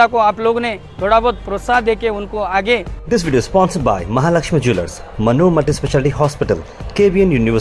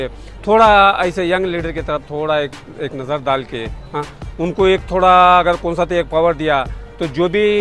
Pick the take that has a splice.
first; 1 cut; at 2.9 s

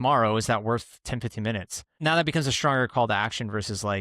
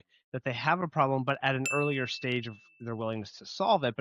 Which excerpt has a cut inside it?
first; 1 cut; at 1.9 s

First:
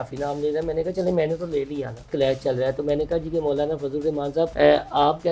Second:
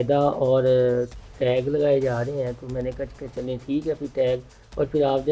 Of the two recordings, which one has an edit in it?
first; 2 cuts; at 2.0 s, 4.5 s

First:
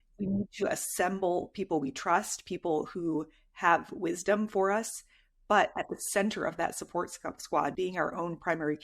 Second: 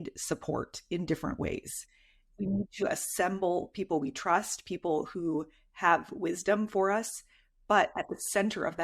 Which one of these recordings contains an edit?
first; 1 cut; at 7.7 s

